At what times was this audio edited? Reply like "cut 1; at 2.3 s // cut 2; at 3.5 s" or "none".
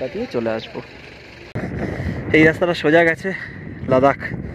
cut 1; at 1.7 s